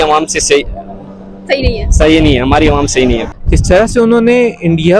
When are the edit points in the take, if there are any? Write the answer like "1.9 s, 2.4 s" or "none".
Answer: 3.3 s